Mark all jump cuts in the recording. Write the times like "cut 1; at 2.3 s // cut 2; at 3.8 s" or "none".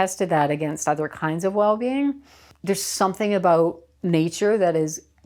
cut 1; at 2.5 s